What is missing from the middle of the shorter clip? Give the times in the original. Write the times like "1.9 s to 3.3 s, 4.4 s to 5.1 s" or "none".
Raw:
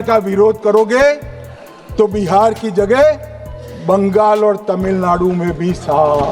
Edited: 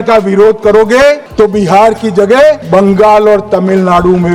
1.2 s to 1.8 s, 3.2 s to 3.8 s